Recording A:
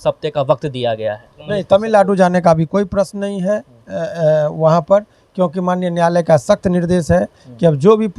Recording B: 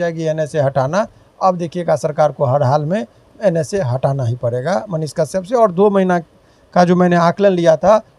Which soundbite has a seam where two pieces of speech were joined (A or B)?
A